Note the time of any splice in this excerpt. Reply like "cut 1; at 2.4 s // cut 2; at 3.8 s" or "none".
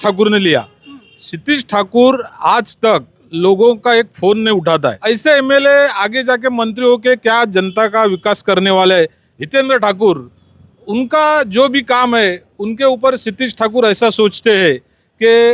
cut 1; at 5.0 s // cut 2; at 9.2 s